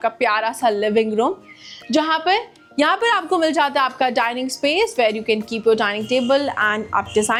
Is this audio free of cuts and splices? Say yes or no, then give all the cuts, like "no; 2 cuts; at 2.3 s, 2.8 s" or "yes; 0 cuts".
yes; 0 cuts